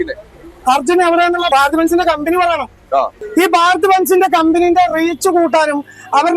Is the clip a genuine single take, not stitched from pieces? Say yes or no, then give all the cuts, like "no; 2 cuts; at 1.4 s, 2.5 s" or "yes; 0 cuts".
no; 2 cuts; at 1.5 s, 3.2 s